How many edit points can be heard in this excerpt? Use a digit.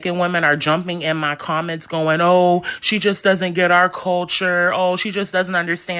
0